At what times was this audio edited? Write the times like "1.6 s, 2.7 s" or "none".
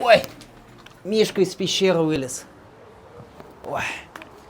none

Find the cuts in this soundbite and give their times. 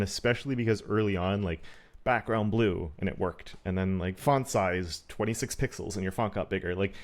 none

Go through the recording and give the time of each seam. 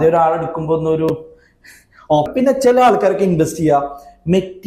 2.3 s

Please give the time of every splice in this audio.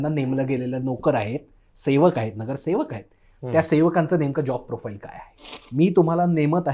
5.6 s

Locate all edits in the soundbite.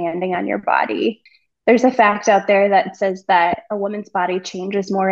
1.3 s

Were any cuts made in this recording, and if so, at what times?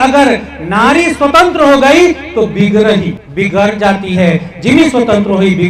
3.2 s

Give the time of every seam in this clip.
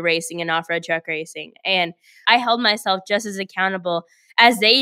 2.2 s

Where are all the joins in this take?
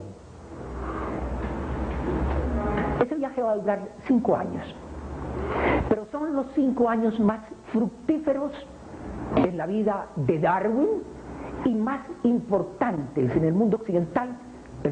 6.7 s

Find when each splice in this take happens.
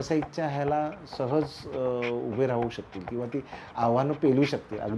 none

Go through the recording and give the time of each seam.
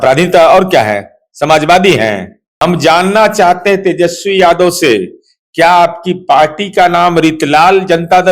2.4 s

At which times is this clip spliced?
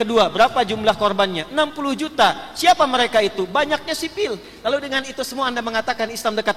4.5 s

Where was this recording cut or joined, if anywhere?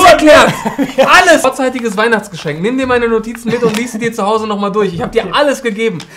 1.4 s

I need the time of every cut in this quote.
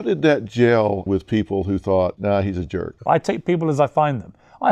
1.1 s, 2.7 s

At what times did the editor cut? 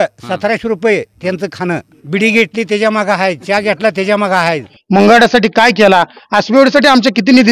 1.9 s, 4.7 s

